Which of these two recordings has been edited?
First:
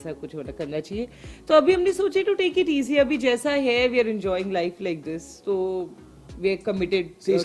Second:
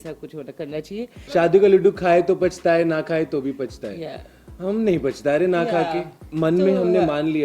second; 2 cuts; at 1.2 s, 6.2 s

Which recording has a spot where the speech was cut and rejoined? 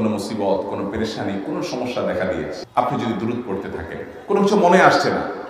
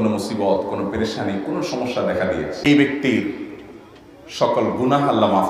second; 1 cut; at 2.6 s

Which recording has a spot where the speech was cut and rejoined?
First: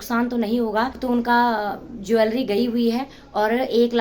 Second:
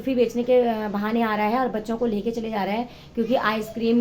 first; 1 cut; at 1.0 s

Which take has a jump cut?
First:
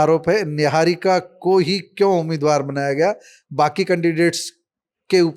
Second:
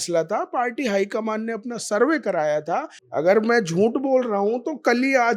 second; 1 cut; at 3.0 s

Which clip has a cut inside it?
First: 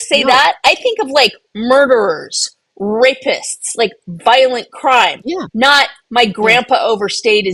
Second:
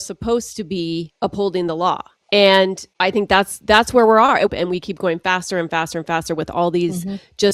second; 4 cuts; at 1.1 s, 2.1 s, 2.9 s, 4.5 s

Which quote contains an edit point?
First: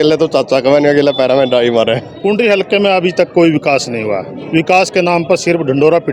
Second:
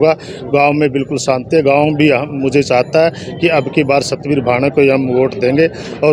first; 1 cut; at 2.1 s

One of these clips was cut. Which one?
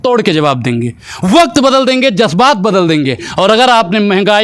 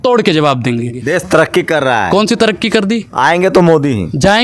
second; 1 cut; at 1.0 s

